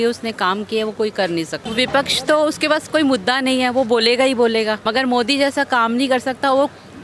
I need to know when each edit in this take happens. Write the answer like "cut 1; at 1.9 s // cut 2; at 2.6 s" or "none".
cut 1; at 1.6 s // cut 2; at 4.8 s

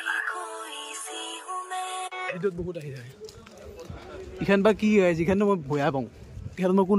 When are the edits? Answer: cut 1; at 2.4 s

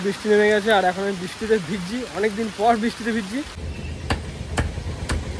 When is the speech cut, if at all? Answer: cut 1; at 3.6 s

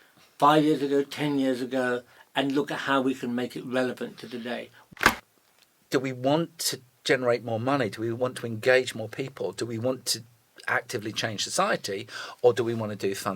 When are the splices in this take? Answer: cut 1; at 4.9 s

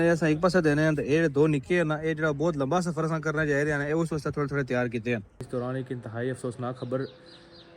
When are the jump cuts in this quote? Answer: cut 1; at 5.4 s

